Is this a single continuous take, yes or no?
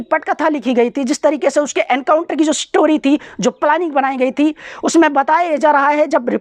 yes